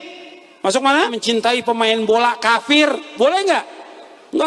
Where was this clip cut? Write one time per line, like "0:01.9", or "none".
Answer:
0:01.2

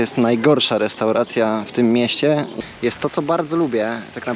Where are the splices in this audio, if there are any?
0:02.5

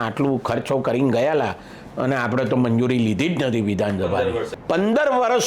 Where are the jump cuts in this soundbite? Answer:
0:04.5

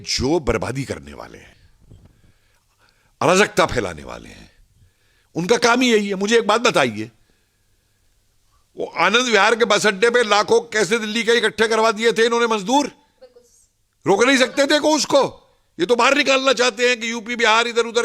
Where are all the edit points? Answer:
0:01.5

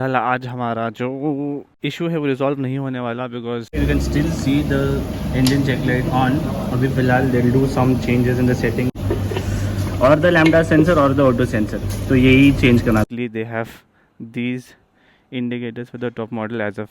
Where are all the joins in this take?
0:01.7
0:03.7
0:09.0
0:13.1

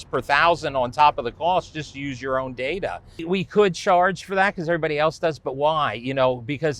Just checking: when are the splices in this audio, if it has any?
0:03.2

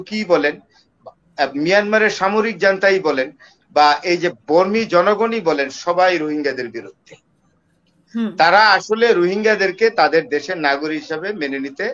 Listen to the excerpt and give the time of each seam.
none

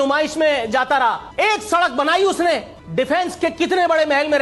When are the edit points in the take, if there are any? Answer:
0:01.2
0:02.8

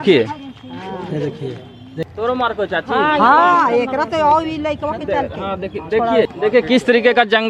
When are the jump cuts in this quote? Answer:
0:02.0
0:06.3

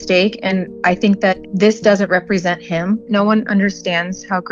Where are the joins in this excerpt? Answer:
0:01.5

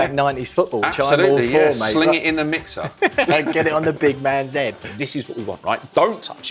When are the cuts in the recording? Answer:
0:04.9

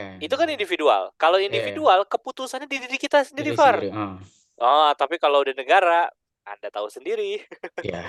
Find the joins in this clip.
none

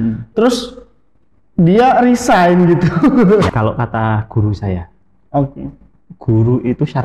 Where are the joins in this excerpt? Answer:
0:03.5

